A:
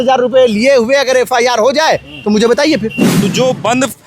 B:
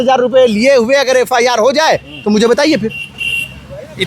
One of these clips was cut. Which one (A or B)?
A